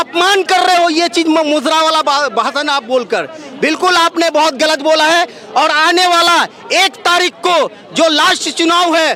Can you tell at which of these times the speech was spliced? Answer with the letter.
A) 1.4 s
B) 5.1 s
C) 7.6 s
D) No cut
D